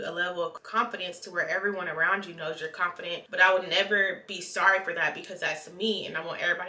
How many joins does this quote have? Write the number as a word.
one